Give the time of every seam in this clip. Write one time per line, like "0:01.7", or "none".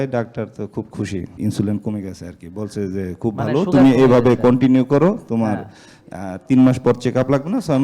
0:01.3